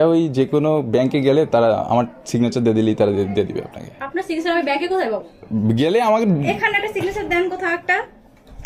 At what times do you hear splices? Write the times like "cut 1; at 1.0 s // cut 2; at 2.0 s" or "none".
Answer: none